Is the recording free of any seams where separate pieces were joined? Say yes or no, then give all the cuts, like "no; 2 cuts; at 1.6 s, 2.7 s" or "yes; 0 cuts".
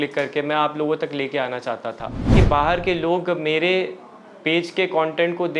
no; 1 cut; at 2.3 s